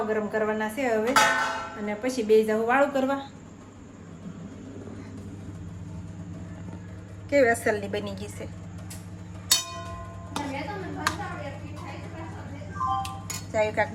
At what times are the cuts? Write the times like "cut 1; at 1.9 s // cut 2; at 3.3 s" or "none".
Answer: none

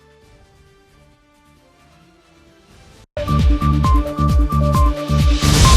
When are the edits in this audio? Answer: cut 1; at 3.1 s

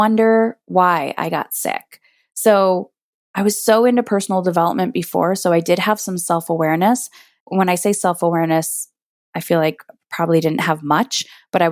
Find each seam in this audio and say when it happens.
cut 1; at 7.4 s

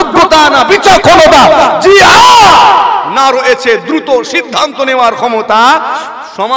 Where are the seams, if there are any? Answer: none

